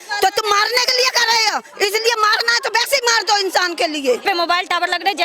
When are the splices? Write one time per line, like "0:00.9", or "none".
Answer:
0:04.2